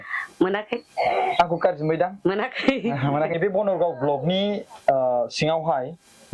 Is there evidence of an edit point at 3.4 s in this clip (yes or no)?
yes